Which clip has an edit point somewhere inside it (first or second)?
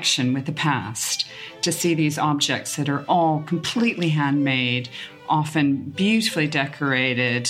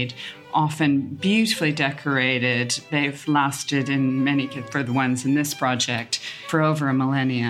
second